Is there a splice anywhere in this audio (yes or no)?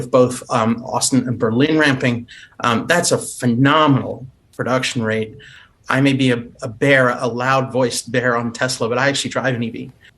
yes